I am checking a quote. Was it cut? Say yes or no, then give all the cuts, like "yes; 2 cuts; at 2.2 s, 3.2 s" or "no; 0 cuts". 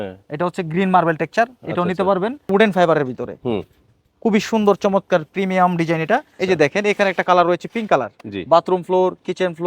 yes; 2 cuts; at 2.5 s, 6.3 s